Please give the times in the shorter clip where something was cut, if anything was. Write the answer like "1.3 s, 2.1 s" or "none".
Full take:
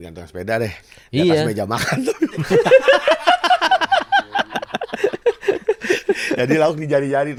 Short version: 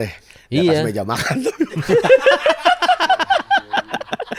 none